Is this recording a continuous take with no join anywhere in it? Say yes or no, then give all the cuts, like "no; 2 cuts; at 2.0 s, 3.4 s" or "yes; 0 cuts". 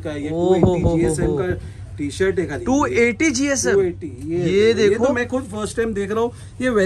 yes; 0 cuts